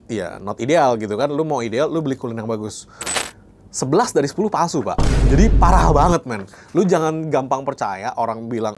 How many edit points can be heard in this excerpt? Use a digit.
1